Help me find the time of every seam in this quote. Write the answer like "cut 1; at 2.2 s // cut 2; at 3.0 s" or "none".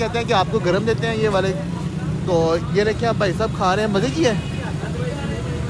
none